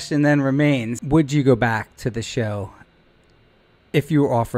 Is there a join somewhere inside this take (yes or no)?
yes